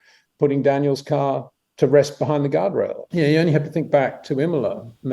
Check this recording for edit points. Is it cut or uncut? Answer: cut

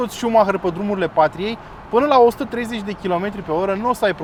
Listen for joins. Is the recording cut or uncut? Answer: uncut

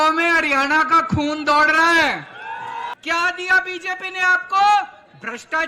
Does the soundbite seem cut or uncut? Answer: cut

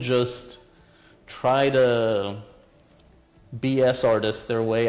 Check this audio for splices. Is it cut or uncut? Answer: uncut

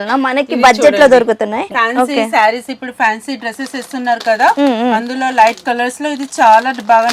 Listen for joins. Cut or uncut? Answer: cut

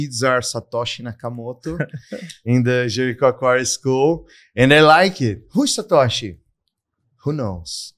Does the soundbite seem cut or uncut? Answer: uncut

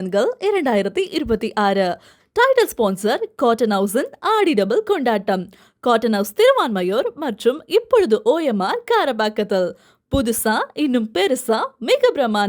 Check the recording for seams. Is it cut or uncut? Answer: uncut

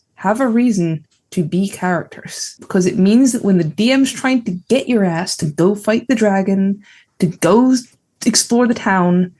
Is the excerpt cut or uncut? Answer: uncut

